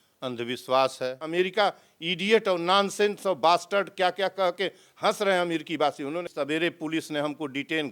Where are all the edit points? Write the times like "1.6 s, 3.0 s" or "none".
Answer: 1.2 s, 6.3 s

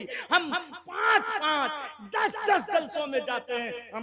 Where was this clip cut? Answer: none

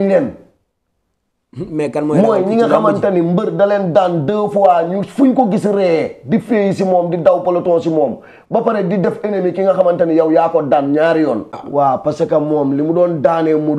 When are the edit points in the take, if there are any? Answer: 11.6 s

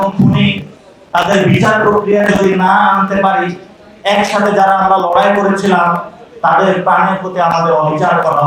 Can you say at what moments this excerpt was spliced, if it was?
none

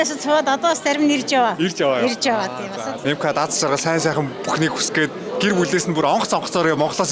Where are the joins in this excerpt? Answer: none

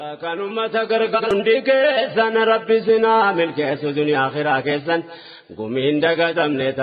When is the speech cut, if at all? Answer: 1.3 s

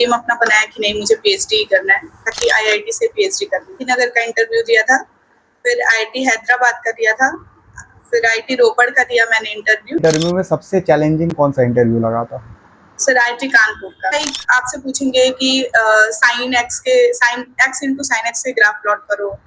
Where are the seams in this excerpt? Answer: 2.3 s, 3.8 s, 10.0 s, 14.1 s

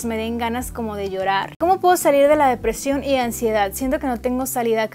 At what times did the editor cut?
1.6 s

